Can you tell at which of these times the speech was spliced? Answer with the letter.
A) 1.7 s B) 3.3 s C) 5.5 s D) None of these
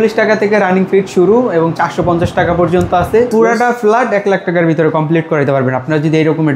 B